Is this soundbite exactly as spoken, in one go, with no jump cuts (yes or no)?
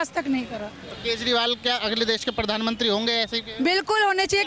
yes